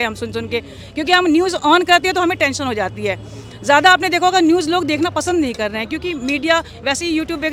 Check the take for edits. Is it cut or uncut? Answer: uncut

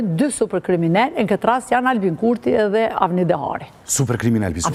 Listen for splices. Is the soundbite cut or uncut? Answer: uncut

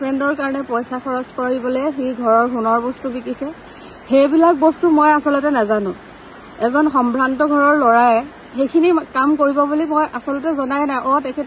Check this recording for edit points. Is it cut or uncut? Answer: uncut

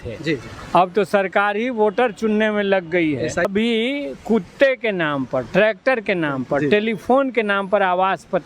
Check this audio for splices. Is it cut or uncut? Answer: cut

